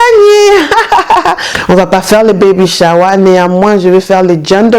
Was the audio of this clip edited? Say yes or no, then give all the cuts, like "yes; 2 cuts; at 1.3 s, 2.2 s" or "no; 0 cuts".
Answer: yes; 1 cut; at 1.5 s